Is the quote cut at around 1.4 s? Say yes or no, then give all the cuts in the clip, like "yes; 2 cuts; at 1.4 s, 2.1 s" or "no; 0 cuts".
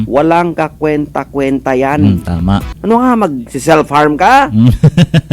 no; 1 cut; at 2.7 s